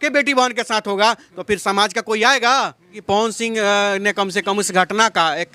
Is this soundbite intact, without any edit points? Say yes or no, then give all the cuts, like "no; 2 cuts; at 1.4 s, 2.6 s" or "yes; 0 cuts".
no; 1 cut; at 3.0 s